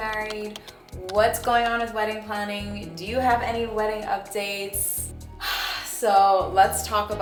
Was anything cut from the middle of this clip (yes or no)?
no